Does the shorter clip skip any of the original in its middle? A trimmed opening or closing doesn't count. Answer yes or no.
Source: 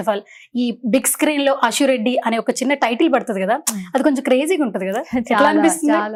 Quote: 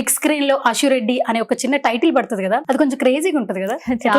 yes